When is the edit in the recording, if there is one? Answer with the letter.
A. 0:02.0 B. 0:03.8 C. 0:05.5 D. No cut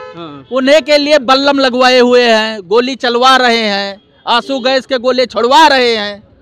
D